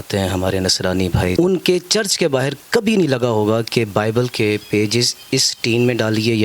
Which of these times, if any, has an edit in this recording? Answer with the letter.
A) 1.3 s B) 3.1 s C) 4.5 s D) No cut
A